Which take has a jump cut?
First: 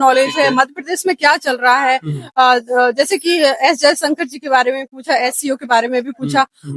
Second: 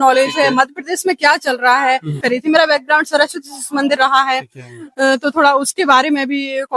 second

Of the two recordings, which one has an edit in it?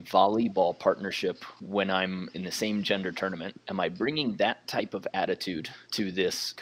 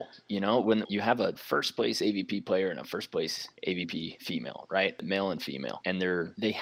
second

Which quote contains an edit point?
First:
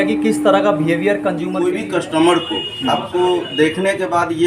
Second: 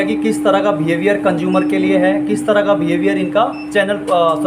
first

